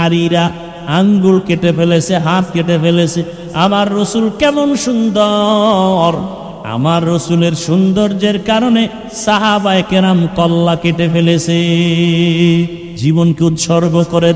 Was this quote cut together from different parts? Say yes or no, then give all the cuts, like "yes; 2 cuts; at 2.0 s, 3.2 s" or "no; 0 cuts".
yes; 1 cut; at 12.8 s